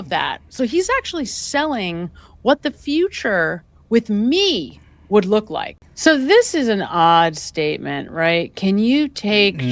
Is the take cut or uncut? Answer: cut